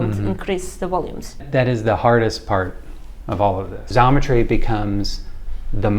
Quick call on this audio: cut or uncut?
cut